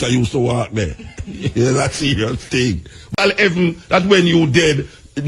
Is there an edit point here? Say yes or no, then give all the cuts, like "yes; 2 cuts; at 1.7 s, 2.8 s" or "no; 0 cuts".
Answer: yes; 1 cut; at 3.1 s